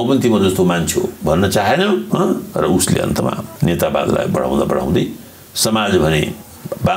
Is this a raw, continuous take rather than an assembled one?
no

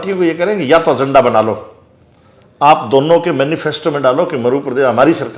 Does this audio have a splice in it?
no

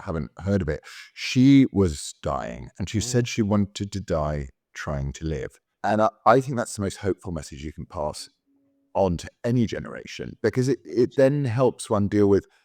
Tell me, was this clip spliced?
yes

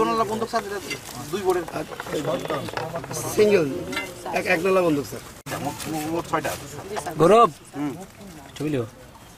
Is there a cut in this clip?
yes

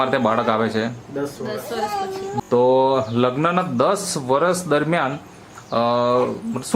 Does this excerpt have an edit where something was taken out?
yes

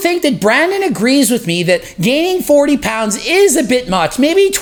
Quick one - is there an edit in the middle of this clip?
no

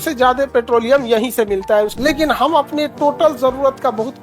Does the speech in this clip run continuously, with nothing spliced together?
no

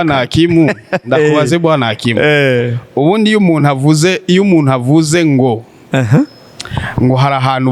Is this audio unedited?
yes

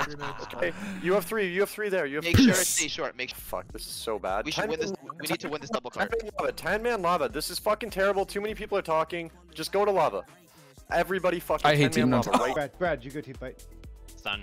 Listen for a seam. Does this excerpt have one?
yes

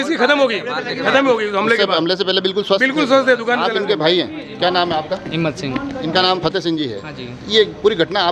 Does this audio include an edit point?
no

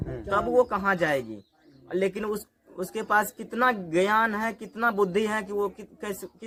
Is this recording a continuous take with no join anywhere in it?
yes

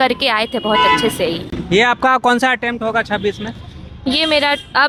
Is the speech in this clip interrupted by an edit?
no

